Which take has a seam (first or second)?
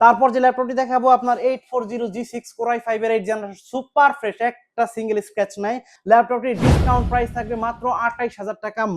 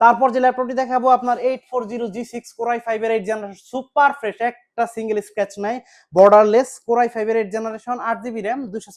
first